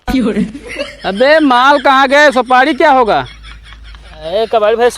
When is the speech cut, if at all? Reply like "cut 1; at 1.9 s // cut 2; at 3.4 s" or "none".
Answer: cut 1; at 0.9 s